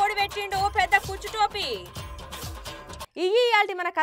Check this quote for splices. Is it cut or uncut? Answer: uncut